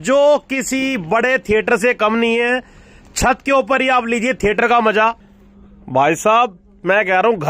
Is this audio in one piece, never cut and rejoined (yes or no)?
no